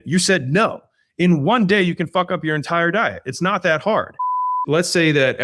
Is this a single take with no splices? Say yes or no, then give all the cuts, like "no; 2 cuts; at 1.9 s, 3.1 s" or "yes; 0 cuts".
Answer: no; 1 cut; at 4.5 s